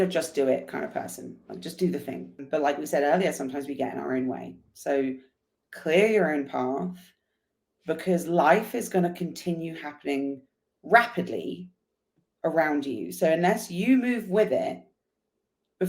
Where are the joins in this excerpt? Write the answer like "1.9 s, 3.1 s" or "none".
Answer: 2.4 s